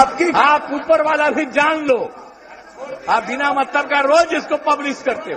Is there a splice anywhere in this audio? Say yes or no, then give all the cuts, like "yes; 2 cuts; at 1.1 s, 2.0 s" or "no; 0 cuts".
yes; 1 cut; at 4.4 s